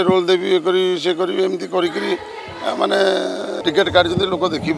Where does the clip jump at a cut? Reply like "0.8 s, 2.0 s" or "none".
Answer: 3.5 s